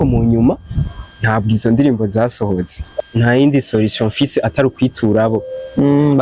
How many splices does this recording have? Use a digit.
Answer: 1